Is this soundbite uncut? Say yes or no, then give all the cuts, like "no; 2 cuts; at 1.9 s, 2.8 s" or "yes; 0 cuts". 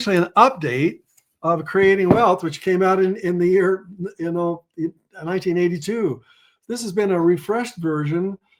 yes; 0 cuts